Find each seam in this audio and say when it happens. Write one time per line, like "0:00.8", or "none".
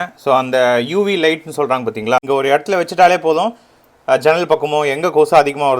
0:02.2